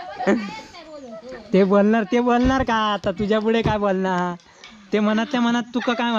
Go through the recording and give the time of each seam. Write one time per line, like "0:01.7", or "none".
0:04.9